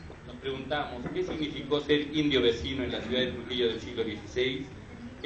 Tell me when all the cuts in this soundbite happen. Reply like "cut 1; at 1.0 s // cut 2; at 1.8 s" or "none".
none